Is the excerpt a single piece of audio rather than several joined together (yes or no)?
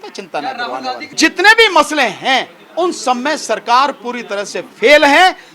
no